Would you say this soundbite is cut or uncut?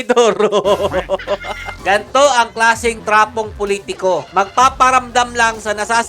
cut